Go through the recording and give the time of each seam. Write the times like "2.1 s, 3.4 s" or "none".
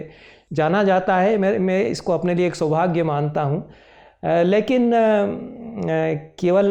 none